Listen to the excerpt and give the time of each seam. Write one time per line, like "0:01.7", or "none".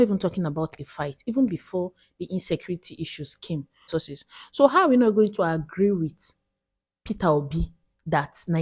0:03.9